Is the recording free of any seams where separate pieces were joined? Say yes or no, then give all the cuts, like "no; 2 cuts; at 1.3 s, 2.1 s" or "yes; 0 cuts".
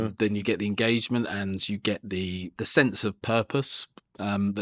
no; 1 cut; at 2.5 s